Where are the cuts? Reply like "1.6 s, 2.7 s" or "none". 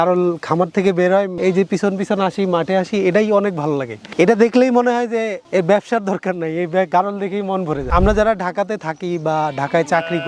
1.3 s, 7.9 s